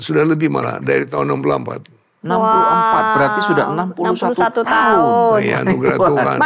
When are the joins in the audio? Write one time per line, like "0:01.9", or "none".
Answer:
none